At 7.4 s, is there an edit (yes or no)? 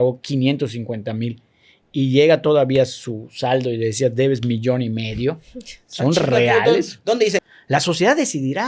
yes